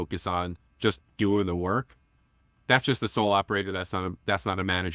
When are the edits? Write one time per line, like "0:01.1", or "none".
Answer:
none